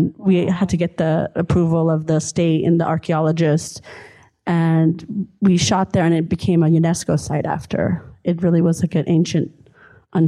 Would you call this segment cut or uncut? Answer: uncut